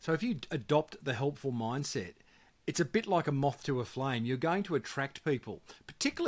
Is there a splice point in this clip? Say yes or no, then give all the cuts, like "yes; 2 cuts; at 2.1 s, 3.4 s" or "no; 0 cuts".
no; 0 cuts